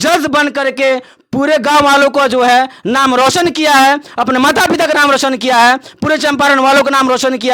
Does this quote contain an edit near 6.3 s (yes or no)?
no